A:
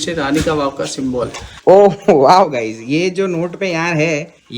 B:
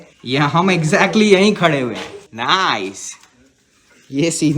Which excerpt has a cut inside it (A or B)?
A